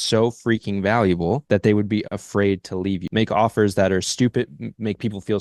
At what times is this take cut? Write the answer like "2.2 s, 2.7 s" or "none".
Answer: 1.4 s, 3.0 s